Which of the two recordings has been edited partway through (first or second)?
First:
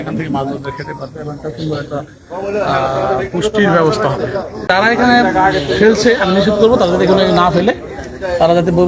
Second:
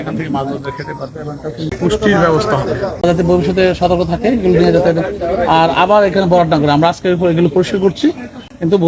second